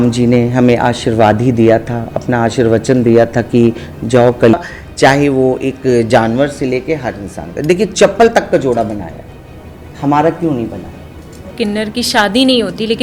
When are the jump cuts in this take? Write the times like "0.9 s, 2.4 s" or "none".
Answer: 4.5 s, 11.5 s